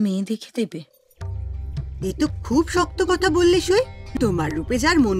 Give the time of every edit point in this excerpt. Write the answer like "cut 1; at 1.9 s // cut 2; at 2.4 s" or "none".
cut 1; at 4.0 s